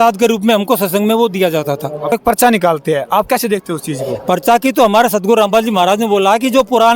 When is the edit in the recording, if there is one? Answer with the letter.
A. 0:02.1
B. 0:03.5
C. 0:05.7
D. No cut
A